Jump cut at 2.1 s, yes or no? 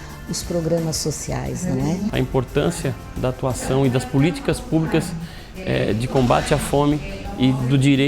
yes